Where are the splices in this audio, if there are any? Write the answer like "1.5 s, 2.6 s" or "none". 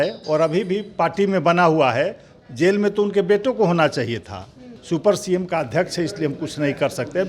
4.7 s